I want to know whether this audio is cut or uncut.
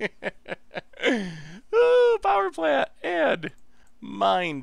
uncut